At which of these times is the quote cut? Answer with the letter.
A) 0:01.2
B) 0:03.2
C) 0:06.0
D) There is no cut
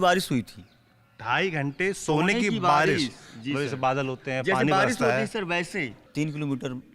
C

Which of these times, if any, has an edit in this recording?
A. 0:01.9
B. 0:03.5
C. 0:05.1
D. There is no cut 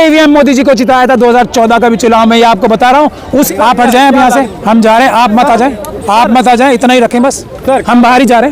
B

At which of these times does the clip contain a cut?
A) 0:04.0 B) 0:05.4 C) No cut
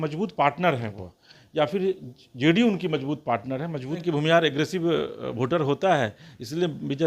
A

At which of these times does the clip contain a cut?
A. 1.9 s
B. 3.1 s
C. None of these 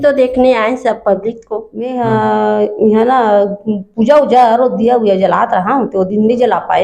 A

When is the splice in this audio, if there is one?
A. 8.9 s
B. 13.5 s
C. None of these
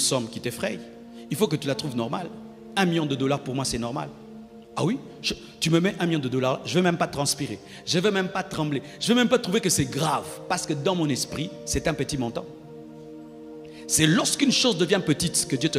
C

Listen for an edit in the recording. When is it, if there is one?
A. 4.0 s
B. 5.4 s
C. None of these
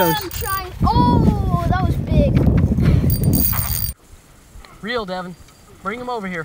A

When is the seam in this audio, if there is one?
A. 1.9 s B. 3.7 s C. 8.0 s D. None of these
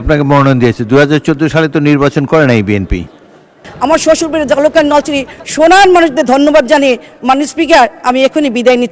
B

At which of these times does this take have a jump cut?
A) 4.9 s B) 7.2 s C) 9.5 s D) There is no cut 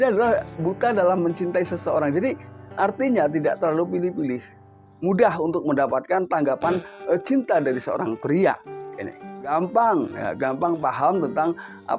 C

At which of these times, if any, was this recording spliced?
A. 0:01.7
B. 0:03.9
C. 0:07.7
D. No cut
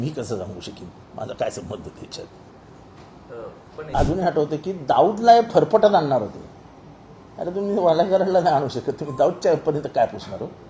B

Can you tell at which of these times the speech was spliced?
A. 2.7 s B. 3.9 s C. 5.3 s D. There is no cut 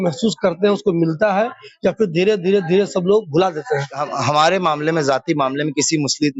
B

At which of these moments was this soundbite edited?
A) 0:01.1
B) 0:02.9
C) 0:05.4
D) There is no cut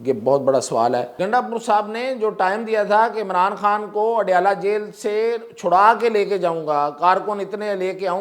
A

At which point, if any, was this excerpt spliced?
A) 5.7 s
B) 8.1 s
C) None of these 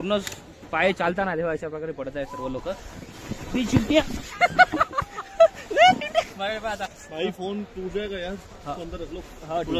A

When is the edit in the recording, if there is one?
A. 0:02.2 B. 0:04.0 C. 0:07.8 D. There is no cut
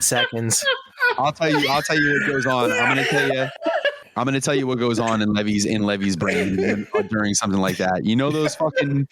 B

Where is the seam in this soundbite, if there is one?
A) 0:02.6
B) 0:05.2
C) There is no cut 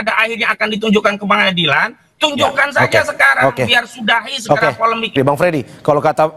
B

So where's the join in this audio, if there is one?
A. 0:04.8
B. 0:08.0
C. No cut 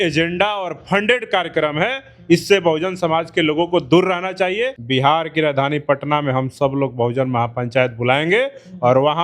A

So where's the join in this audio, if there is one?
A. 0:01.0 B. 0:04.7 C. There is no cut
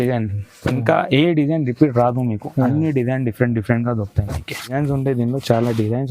B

